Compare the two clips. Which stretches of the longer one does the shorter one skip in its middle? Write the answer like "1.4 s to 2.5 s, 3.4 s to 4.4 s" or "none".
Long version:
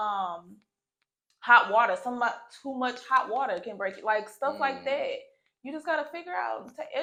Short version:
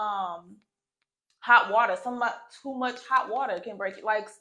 none